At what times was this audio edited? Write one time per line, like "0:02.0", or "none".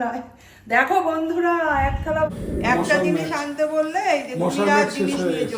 0:02.5